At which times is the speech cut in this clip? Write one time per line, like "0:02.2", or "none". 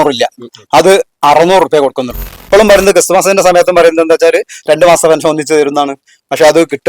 0:02.3